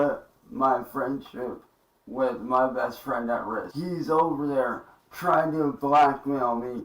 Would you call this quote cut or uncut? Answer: cut